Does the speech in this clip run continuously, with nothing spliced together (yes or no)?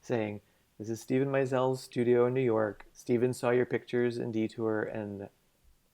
no